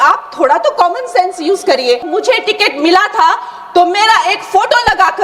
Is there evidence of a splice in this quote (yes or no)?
yes